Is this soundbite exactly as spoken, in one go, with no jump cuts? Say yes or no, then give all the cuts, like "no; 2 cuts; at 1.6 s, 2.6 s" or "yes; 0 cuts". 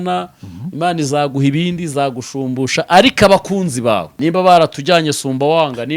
no; 1 cut; at 4.1 s